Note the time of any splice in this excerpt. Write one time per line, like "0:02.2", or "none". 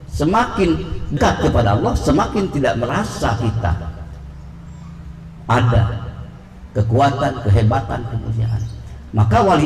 0:01.1